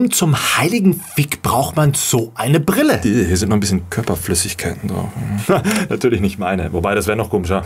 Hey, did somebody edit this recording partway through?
no; 0 cuts

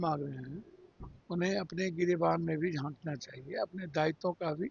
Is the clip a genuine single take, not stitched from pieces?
yes; 0 cuts

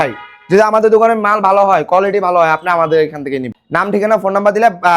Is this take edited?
yes; 1 cut; at 3.5 s

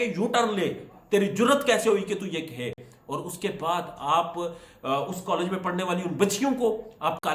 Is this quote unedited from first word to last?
yes; 0 cuts

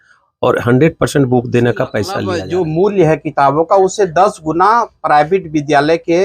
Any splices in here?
yes; 1 cut; at 2.2 s

